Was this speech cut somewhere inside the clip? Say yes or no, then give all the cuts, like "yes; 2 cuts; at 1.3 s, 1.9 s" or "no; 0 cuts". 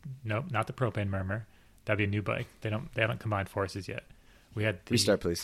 no; 0 cuts